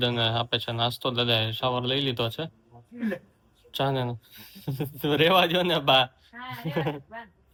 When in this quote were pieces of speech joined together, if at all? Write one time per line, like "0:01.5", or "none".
none